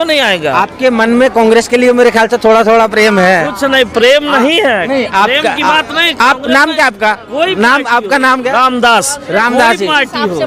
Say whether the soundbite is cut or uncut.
uncut